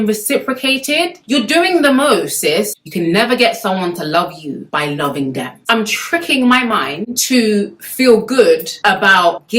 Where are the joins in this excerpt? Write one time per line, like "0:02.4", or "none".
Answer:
0:02.8
0:05.5